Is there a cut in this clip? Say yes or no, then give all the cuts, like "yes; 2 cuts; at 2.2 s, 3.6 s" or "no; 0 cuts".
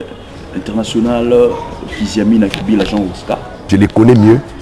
yes; 1 cut; at 3.6 s